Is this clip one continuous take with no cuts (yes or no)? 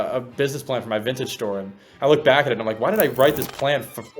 yes